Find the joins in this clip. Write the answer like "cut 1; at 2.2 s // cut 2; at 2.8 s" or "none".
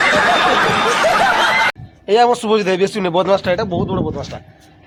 none

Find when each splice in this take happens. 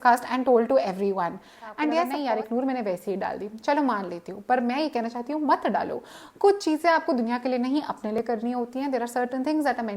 cut 1; at 2.1 s

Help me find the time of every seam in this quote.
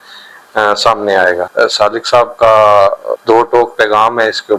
cut 1; at 1.5 s // cut 2; at 3.1 s

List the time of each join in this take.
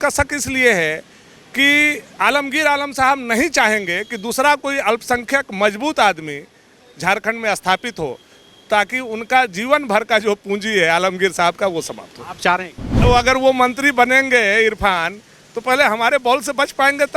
cut 1; at 13.0 s

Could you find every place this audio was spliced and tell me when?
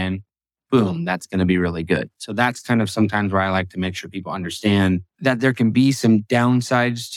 cut 1; at 5.1 s // cut 2; at 6.3 s

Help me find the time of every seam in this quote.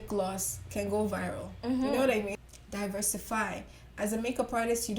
cut 1; at 2.4 s

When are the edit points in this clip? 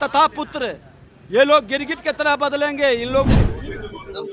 cut 1; at 3.2 s

